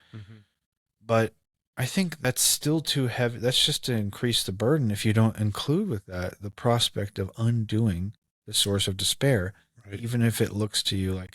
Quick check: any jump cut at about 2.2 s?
yes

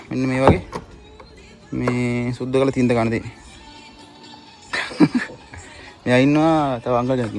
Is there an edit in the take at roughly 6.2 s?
no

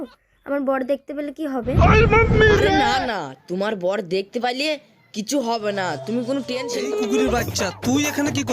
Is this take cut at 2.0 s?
no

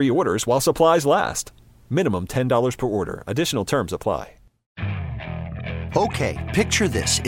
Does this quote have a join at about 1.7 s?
no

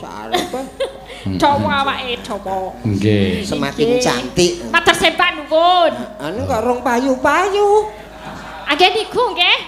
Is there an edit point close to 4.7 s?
no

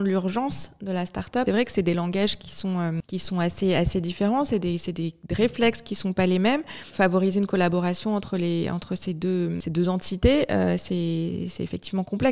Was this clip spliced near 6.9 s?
yes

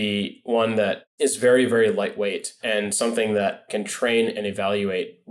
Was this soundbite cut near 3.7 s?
yes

